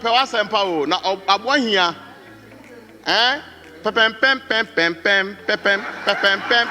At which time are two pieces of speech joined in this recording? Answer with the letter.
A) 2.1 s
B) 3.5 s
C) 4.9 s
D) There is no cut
D